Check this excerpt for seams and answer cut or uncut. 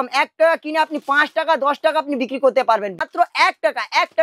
cut